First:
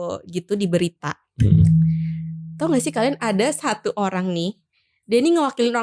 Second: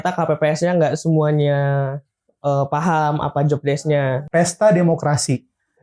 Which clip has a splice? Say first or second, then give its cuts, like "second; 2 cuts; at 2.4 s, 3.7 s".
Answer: second; 1 cut; at 4.2 s